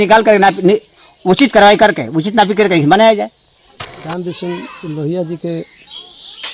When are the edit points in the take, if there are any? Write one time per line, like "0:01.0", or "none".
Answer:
0:04.1